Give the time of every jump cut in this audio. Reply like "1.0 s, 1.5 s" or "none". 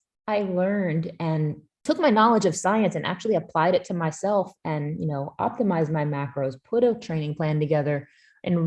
1.7 s